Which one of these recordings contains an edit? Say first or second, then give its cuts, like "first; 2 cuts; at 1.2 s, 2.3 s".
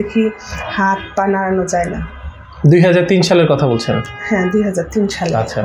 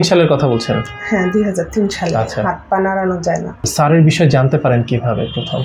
second; 1 cut; at 3.7 s